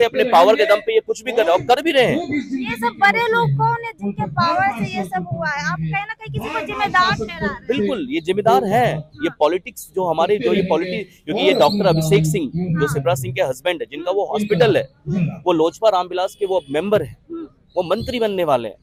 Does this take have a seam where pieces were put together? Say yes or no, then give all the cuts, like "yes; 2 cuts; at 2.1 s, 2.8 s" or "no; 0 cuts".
no; 0 cuts